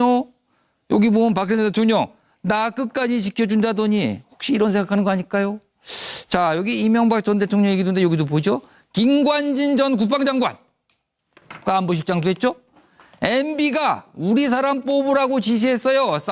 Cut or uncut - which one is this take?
cut